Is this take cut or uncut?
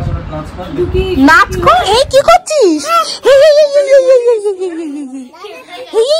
cut